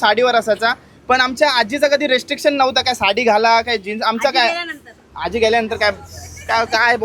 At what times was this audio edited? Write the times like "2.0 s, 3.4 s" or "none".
none